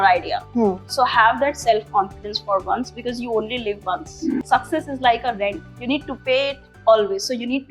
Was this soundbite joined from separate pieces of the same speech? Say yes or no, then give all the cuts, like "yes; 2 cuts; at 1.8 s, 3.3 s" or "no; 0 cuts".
yes; 4 cuts; at 0.8 s, 4.4 s, 5.7 s, 6.7 s